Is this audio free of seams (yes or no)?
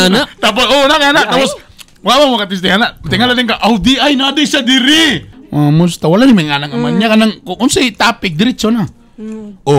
no